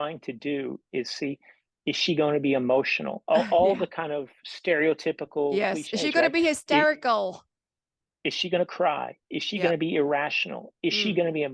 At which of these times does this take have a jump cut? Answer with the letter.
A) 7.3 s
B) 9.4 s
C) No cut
C